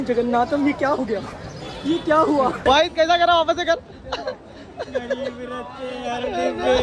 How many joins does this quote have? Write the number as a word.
one